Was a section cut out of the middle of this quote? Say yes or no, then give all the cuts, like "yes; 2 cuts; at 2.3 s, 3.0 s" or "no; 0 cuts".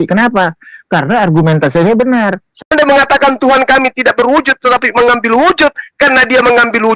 yes; 1 cut; at 2.7 s